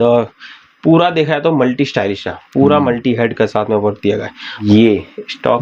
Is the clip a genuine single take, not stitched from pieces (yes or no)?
no